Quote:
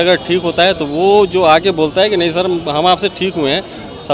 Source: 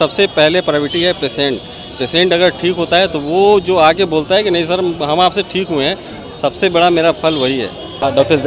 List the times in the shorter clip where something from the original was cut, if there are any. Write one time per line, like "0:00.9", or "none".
none

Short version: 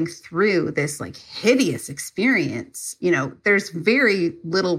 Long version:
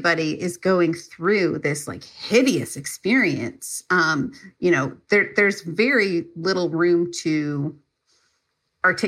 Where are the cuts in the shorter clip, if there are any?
0:03.3

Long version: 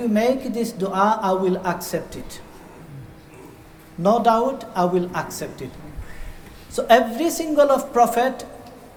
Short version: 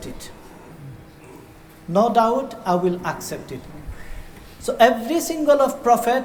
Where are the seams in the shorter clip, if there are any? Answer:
none

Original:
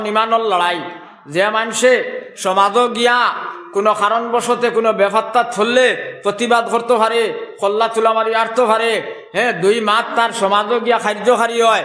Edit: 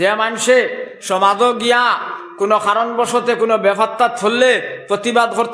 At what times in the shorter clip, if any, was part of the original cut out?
none

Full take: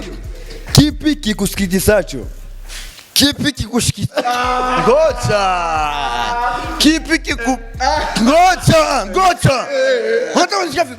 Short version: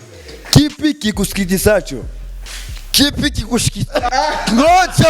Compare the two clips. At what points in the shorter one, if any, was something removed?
0:04.1

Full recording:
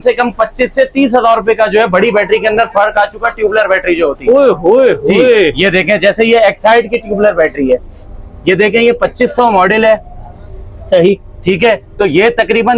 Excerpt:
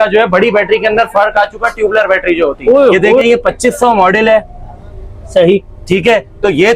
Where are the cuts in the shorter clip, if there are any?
0:03.2

